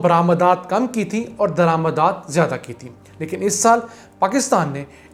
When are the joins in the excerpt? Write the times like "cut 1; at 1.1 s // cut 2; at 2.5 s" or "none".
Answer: none

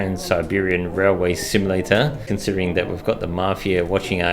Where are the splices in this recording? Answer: cut 1; at 2.2 s

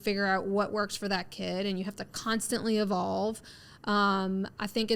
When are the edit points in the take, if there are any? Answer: none

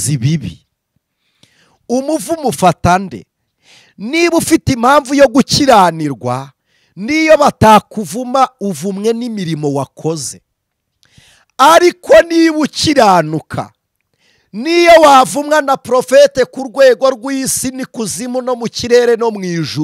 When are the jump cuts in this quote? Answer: none

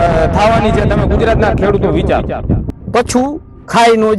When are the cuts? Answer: cut 1; at 2.7 s

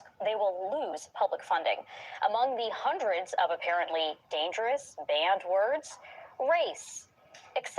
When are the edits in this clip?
cut 1; at 3.0 s

